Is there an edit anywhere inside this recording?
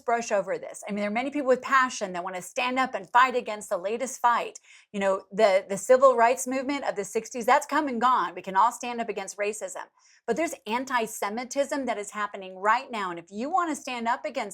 no; 0 cuts

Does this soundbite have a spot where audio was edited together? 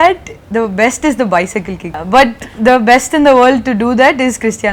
yes; 1 cut; at 2.0 s

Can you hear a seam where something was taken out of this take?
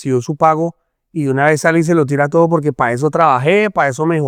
no; 0 cuts

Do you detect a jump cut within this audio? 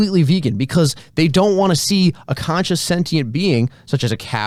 no; 0 cuts

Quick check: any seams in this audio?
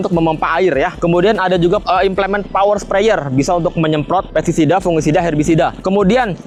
no; 0 cuts

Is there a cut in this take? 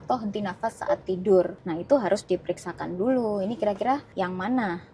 yes; 2 cuts; at 1.7 s, 4.1 s

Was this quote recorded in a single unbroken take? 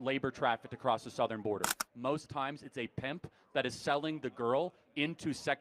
no; 1 cut; at 1.8 s

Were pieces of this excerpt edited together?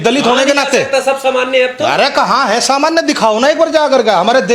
no; 0 cuts

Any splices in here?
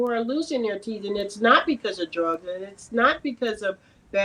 no; 0 cuts

